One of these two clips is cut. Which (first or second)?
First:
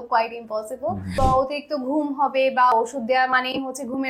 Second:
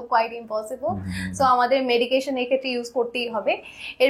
first